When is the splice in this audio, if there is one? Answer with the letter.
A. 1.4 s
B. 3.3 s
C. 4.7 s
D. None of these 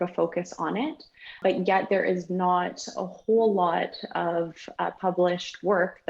A